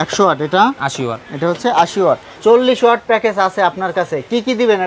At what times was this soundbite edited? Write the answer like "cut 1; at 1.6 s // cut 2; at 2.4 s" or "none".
cut 1; at 2.4 s

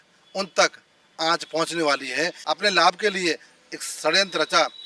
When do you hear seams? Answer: cut 1; at 2.4 s

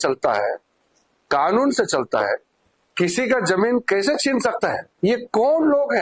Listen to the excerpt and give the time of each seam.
cut 1; at 4.9 s

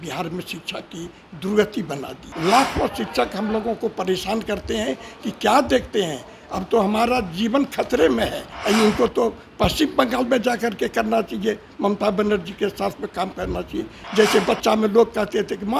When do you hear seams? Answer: cut 1; at 2.2 s // cut 2; at 8.5 s // cut 3; at 14.0 s

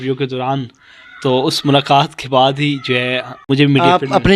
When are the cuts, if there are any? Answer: cut 1; at 3.4 s

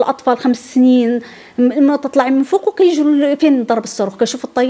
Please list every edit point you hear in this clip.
none

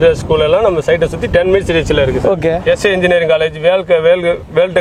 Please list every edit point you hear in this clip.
cut 1; at 2.6 s

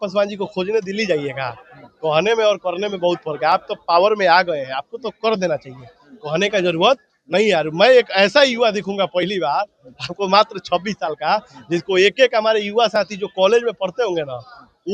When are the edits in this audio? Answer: none

